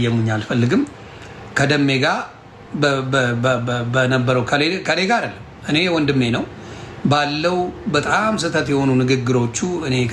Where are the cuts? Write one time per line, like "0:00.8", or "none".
none